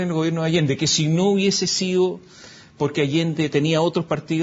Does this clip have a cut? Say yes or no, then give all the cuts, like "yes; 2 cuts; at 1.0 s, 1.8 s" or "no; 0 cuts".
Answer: no; 0 cuts